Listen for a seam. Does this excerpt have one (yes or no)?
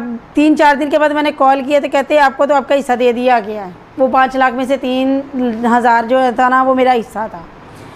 no